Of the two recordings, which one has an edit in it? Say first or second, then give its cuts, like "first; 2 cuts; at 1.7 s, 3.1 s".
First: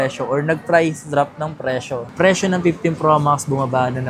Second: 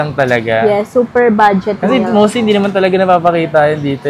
first; 1 cut; at 2.1 s